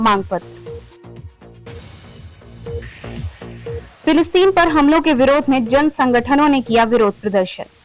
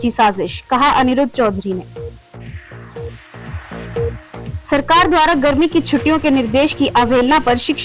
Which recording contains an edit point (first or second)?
second